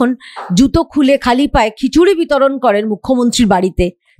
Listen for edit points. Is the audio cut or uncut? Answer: uncut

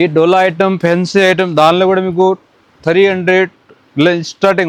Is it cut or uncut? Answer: uncut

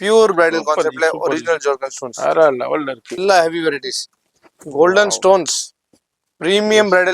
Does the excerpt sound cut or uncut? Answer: cut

